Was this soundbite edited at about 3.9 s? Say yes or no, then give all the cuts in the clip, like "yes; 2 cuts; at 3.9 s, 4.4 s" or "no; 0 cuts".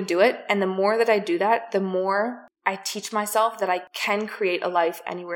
yes; 2 cuts; at 2.5 s, 3.9 s